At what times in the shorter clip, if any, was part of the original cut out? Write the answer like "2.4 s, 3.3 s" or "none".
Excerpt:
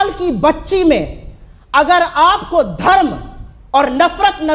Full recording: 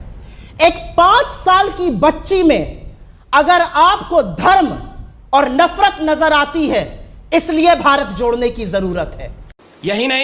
none

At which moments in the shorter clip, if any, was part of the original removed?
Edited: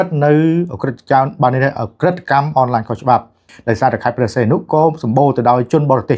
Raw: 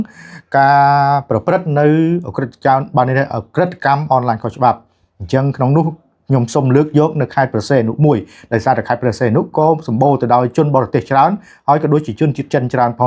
3.5 s

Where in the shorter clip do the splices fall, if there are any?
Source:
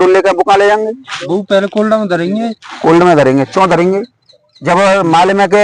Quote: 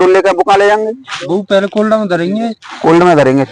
none

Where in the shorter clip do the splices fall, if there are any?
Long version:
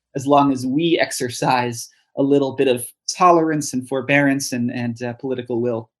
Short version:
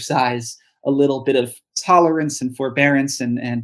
none

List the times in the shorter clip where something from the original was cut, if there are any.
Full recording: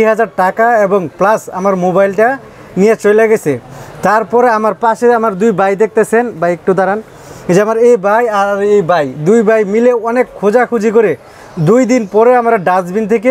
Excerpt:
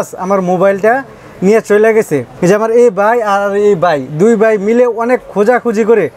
2.3 s

